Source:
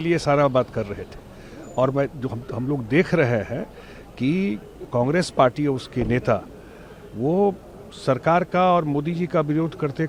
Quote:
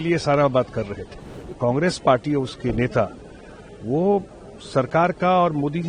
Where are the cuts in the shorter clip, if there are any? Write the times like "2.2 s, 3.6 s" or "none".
1.4 s